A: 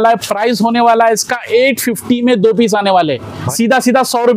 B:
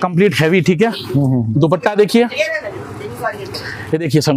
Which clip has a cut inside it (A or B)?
A